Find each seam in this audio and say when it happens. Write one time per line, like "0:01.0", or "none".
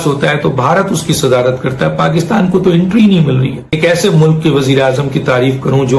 0:03.7

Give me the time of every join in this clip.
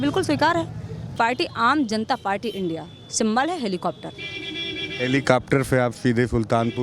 0:01.2

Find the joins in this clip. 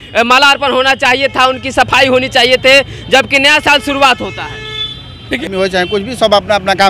0:05.5

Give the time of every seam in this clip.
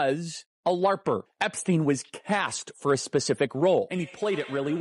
0:01.3
0:03.9

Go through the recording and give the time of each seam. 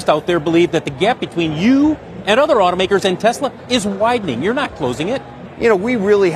0:05.4

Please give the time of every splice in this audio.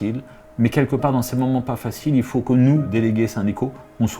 0:02.9

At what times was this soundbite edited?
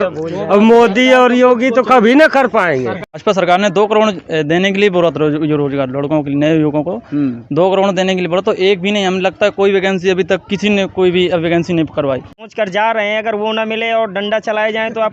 0:03.2
0:12.4

